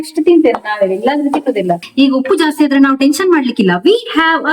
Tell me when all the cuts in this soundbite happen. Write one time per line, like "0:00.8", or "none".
0:01.8